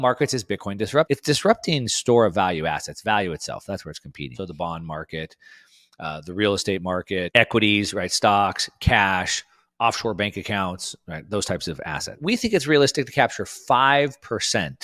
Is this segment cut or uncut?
cut